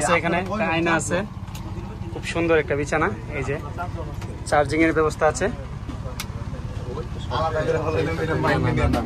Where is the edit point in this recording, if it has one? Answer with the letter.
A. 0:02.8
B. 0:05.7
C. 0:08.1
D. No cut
D